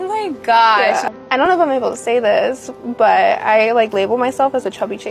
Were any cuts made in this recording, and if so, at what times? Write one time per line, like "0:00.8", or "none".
0:01.0